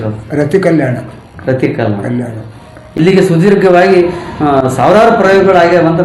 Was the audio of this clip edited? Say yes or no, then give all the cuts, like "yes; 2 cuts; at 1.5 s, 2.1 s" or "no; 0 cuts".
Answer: yes; 1 cut; at 2.8 s